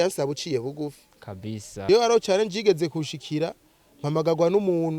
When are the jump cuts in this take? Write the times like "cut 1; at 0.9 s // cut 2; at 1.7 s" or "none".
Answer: cut 1; at 1.7 s